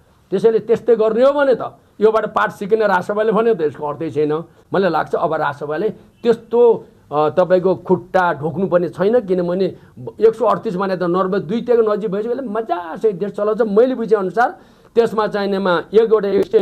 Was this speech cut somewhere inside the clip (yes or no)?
no